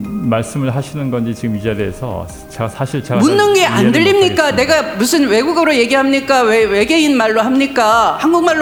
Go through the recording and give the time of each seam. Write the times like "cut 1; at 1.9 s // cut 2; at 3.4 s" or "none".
none